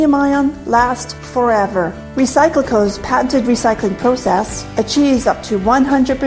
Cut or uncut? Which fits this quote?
cut